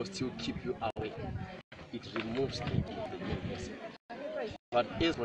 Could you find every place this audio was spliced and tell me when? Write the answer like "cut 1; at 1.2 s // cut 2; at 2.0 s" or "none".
cut 1; at 1.0 s

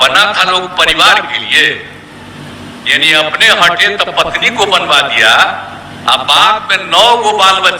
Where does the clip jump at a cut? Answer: none

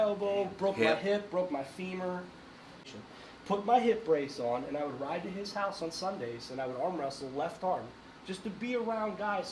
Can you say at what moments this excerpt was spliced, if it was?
cut 1; at 2.8 s

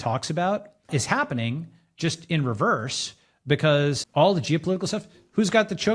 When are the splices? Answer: cut 1; at 0.9 s

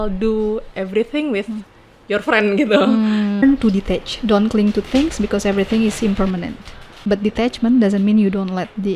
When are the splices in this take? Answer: cut 1; at 3.4 s // cut 2; at 6.9 s

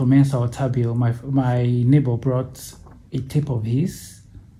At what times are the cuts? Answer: none

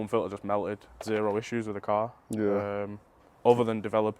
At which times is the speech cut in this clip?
cut 1; at 1.0 s

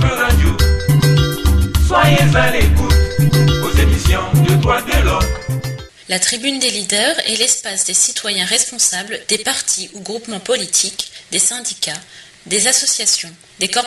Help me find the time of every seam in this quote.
none

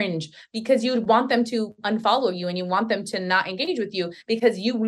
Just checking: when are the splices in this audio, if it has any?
none

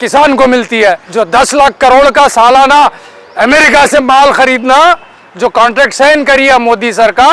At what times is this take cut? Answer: cut 1; at 1.0 s

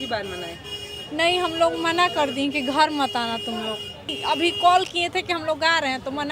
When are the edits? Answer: cut 1; at 4.1 s

